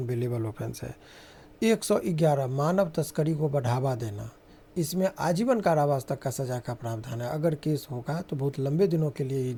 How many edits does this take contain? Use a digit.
0